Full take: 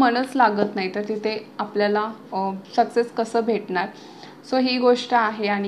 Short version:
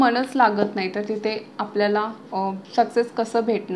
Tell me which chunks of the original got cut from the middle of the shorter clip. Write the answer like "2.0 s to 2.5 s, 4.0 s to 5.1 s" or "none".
none